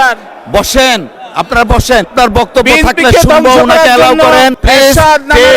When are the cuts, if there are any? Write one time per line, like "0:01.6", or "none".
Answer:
0:02.1
0:04.6